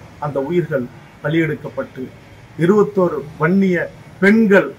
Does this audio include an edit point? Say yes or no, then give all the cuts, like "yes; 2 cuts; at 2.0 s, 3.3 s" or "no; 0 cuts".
no; 0 cuts